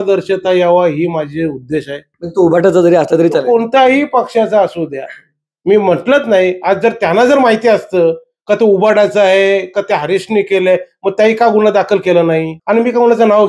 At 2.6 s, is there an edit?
no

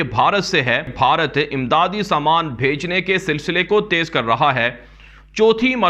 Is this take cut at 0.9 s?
yes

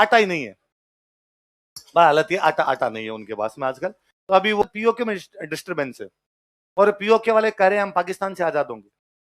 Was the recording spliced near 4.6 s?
yes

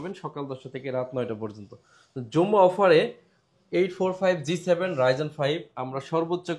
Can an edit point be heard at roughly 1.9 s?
no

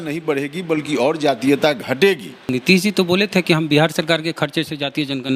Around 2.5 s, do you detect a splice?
yes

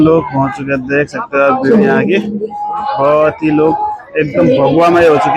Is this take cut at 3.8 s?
no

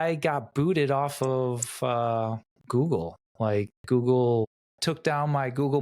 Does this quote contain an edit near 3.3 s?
no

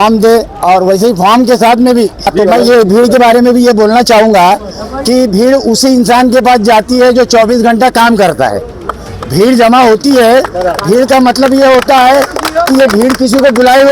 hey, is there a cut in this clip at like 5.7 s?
no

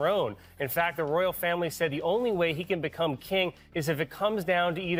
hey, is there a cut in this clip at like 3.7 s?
no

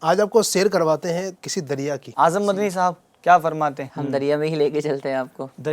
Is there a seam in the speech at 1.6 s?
yes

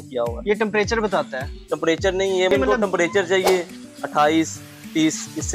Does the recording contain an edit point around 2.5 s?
yes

